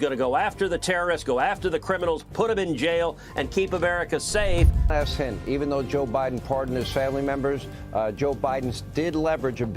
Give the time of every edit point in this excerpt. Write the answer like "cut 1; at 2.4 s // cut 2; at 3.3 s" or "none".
cut 1; at 4.9 s